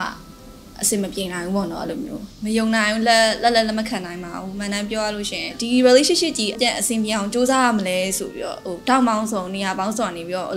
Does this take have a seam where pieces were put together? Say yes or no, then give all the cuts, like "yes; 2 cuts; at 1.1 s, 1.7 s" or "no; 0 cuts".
yes; 3 cuts; at 2.2 s, 5.5 s, 6.6 s